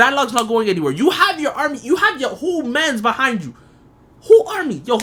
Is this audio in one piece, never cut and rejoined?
yes; 0 cuts

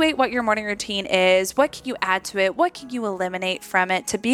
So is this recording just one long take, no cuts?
yes; 0 cuts

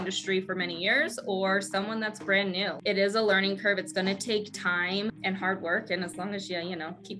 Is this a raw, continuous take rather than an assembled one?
no; 2 cuts; at 2.8 s, 5.2 s

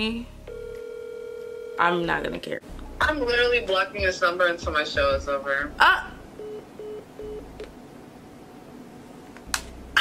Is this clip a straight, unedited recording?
no; 1 cut; at 2.7 s

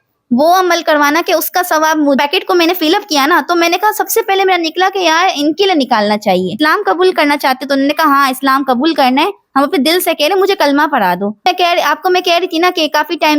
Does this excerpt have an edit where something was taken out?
yes; 3 cuts; at 2.2 s, 6.5 s, 11.4 s

